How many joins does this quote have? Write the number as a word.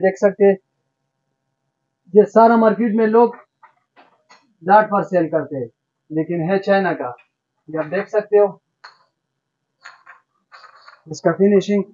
zero